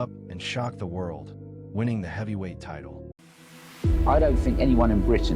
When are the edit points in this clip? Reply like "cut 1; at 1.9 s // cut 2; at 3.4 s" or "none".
cut 1; at 3.1 s